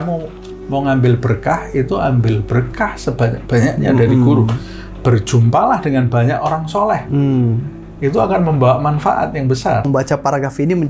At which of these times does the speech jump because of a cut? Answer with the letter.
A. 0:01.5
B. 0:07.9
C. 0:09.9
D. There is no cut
C